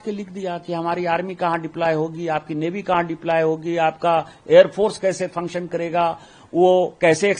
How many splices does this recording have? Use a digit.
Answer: 0